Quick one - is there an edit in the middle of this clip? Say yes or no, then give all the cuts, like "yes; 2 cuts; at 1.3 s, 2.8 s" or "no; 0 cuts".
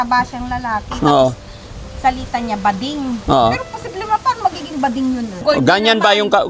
yes; 1 cut; at 5.4 s